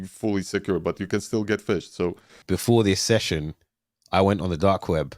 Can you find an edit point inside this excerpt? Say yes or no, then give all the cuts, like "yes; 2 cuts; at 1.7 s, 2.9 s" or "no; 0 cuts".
yes; 1 cut; at 2.4 s